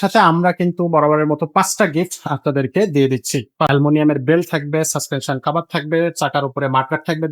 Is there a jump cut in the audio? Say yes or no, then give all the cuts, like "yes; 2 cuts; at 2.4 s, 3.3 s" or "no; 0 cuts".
yes; 1 cut; at 3.7 s